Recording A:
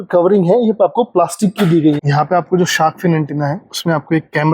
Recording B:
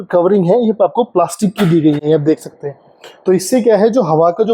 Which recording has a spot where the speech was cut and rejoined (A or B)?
A